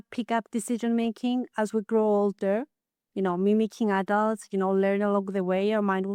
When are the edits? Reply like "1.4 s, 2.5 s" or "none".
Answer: none